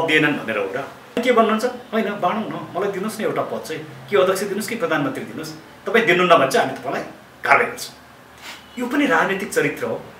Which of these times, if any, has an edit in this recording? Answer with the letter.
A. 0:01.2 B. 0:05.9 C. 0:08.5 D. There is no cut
A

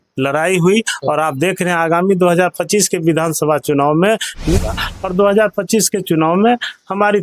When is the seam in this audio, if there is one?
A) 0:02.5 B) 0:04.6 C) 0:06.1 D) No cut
B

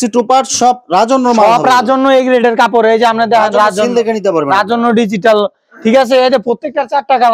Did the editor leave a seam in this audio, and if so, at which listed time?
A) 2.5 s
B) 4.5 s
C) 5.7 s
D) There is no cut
D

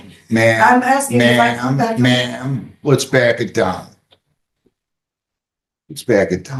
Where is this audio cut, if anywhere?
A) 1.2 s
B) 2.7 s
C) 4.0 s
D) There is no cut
D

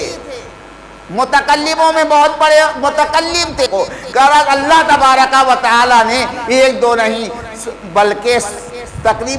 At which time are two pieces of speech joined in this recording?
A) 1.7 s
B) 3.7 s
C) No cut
B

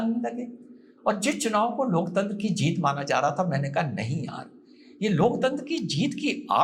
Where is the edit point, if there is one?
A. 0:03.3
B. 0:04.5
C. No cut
C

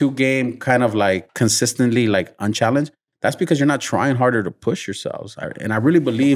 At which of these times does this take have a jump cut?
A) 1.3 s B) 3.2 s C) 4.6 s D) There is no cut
A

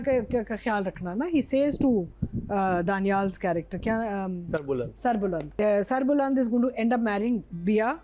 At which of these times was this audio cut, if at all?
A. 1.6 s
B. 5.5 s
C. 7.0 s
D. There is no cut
B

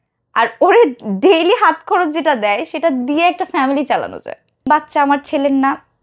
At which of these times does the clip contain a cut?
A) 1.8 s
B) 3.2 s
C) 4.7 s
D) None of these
C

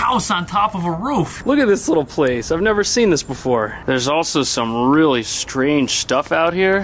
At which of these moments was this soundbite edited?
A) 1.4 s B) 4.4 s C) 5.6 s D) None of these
A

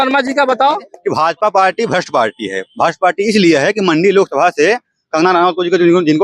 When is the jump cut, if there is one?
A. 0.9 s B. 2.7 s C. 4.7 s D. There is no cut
A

